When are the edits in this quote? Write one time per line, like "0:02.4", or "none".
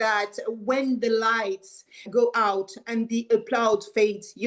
0:02.1